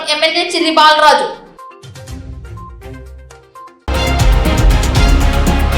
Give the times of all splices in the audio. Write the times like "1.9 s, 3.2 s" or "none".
3.8 s